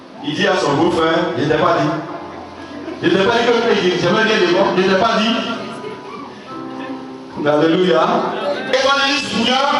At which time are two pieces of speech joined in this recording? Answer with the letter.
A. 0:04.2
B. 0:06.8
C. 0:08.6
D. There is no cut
C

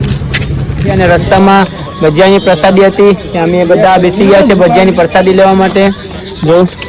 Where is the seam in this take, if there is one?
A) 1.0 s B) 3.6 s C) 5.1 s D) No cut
A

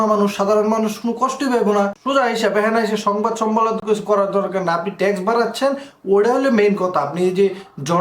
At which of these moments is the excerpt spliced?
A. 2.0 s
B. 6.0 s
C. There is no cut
A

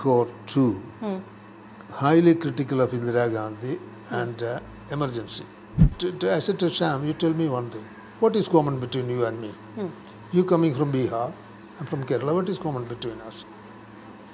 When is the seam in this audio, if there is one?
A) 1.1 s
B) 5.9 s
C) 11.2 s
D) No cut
B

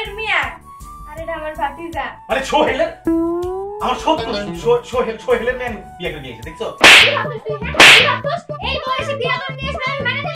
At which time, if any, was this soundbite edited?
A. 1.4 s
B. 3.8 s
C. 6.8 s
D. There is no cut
C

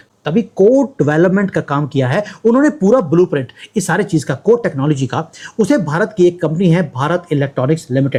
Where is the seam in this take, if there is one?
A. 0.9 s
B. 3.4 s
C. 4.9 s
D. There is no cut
D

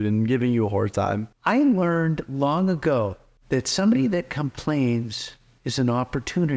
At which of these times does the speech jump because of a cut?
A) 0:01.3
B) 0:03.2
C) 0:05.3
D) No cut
A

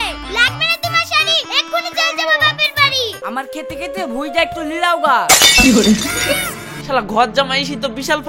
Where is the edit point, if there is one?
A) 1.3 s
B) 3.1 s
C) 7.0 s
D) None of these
B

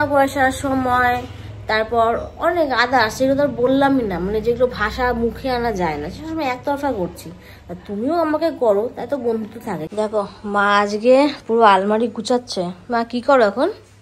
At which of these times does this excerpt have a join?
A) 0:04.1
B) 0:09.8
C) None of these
B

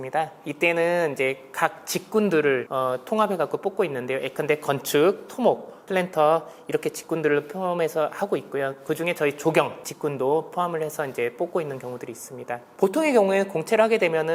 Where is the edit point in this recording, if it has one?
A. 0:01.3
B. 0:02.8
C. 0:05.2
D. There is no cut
D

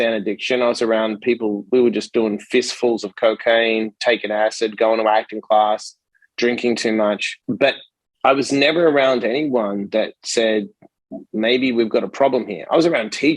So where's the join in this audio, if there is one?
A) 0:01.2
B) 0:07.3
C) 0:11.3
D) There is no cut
B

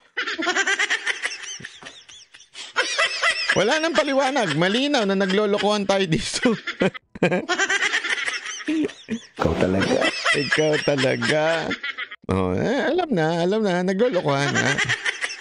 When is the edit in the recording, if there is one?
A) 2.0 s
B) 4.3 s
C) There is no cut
C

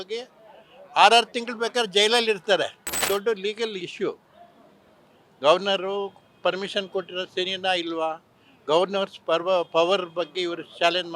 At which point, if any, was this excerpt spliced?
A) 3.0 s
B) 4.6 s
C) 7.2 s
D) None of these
A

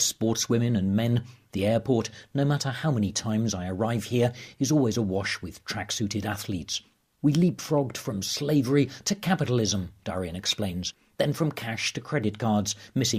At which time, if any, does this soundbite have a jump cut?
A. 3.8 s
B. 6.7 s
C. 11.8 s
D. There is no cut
B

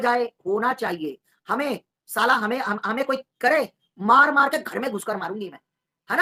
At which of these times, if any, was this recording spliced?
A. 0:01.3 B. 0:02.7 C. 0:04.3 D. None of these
D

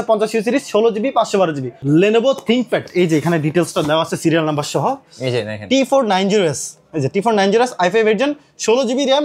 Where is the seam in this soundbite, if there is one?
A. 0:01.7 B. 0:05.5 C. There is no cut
A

